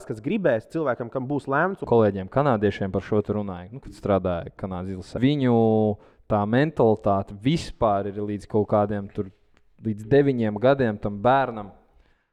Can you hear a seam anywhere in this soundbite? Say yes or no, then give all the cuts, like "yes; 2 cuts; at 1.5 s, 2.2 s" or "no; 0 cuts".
yes; 2 cuts; at 1.8 s, 5.2 s